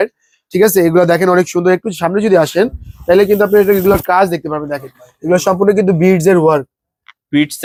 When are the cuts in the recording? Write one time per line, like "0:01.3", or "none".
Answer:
none